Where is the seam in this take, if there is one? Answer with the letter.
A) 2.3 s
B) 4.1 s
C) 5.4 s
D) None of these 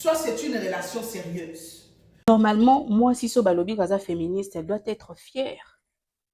A